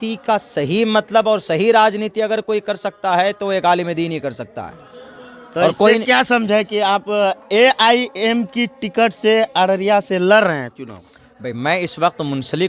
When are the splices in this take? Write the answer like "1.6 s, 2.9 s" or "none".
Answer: none